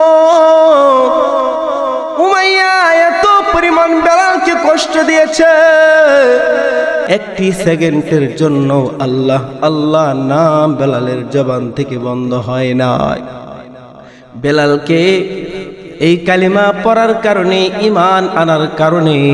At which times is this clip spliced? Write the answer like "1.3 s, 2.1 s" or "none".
7.0 s